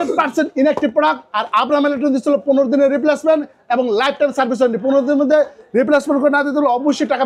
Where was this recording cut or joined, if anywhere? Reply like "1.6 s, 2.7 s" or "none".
none